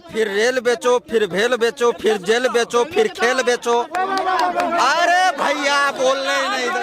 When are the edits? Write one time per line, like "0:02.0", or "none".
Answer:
none